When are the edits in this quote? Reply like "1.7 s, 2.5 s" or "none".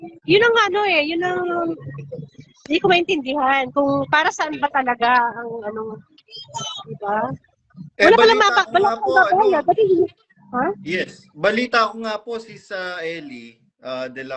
none